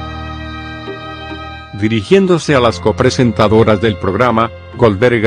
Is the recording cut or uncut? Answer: cut